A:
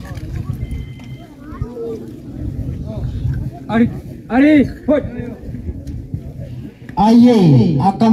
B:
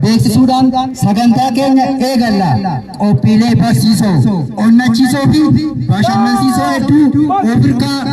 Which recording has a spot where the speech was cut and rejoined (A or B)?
A